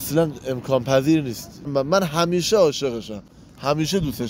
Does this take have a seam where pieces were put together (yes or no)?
yes